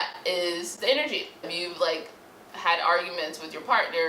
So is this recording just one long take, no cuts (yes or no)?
no